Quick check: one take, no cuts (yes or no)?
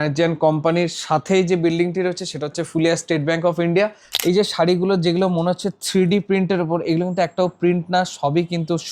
no